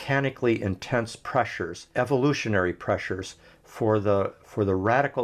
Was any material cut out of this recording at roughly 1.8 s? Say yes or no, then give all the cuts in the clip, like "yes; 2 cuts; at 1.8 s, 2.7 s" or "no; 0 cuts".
yes; 1 cut; at 1.8 s